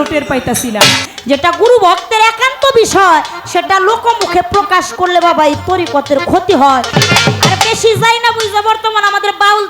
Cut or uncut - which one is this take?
cut